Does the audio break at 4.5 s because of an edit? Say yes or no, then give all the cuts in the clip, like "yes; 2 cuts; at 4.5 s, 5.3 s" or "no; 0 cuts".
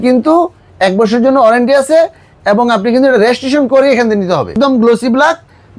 yes; 1 cut; at 4.5 s